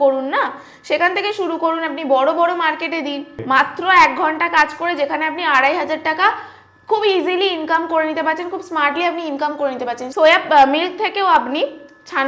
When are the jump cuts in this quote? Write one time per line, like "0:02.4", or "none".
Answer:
0:03.4
0:10.0